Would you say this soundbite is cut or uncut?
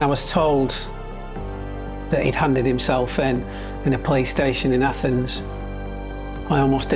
uncut